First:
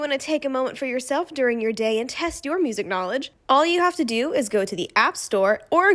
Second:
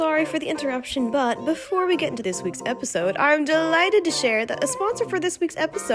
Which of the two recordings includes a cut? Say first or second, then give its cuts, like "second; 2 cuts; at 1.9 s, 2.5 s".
second; 1 cut; at 2.2 s